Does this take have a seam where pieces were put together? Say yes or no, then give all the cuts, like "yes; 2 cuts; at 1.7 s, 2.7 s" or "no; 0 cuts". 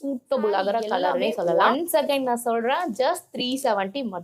yes; 1 cut; at 1.7 s